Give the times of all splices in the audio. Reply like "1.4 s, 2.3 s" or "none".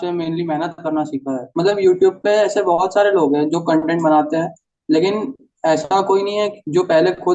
1.4 s